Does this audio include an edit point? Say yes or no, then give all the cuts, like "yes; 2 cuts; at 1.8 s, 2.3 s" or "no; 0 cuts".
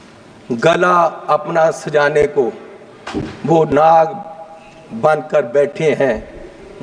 no; 0 cuts